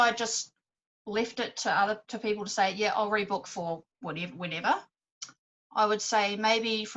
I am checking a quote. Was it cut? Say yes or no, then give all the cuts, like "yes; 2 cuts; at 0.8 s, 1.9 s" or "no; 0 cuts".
no; 0 cuts